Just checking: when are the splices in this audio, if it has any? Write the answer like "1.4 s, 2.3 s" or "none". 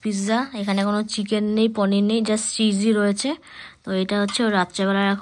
none